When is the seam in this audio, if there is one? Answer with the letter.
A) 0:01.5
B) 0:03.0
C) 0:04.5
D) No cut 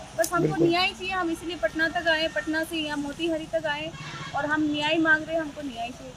D